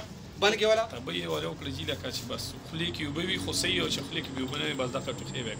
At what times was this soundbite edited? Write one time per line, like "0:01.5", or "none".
0:01.0